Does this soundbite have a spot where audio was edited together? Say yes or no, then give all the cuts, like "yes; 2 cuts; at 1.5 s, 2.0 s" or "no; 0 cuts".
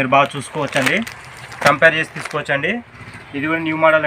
yes; 1 cut; at 3.0 s